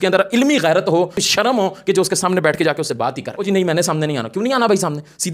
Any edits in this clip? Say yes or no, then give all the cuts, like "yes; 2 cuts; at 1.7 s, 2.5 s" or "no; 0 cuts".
yes; 1 cut; at 3.3 s